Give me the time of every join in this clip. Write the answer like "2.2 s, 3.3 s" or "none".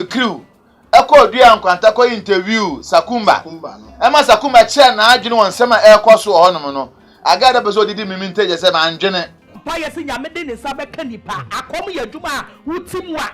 9.6 s